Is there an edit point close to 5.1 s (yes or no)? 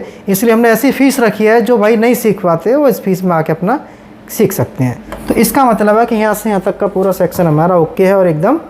yes